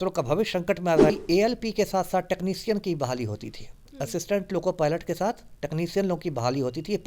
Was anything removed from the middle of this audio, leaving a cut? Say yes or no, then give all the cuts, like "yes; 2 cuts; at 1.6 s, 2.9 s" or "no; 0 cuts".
yes; 1 cut; at 1.1 s